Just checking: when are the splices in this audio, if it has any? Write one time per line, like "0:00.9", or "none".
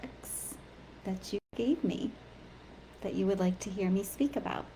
none